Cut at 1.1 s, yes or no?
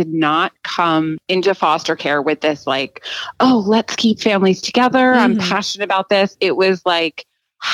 yes